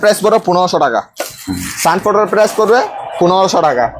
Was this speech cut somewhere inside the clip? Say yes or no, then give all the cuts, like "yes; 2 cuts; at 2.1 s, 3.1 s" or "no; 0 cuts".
no; 0 cuts